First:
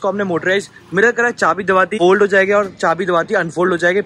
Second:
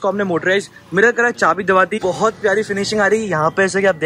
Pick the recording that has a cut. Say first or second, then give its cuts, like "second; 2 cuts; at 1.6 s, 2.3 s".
second; 1 cut; at 1.9 s